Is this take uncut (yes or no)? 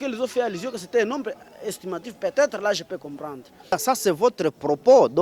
no